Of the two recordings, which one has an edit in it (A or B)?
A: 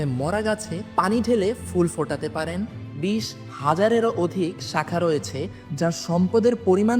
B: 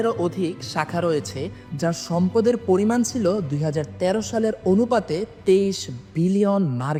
A